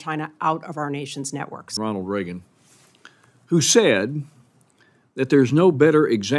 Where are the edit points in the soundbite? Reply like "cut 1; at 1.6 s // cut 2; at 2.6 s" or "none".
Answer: cut 1; at 1.7 s